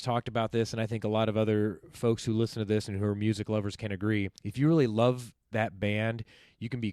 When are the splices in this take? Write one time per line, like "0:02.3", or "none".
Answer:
0:04.4